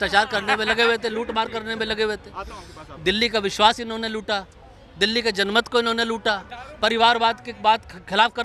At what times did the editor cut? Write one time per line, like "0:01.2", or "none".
none